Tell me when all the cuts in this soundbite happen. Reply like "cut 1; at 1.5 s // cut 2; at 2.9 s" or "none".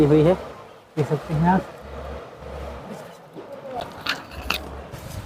none